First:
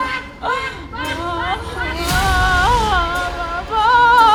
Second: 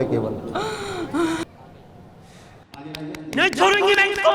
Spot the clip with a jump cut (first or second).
second